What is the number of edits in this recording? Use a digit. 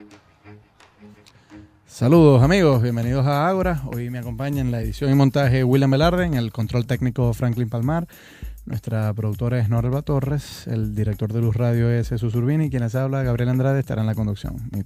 1